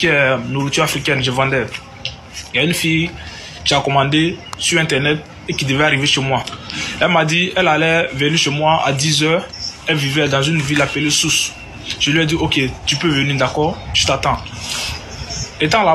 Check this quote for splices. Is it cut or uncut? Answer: uncut